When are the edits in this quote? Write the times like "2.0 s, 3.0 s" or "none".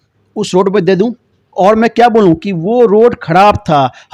none